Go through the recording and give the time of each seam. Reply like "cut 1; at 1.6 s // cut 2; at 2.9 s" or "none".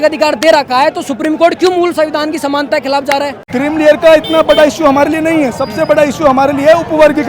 cut 1; at 3.4 s